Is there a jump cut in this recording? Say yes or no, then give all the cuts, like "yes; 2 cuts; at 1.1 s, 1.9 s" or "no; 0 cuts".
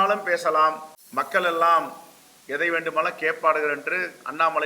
yes; 1 cut; at 0.9 s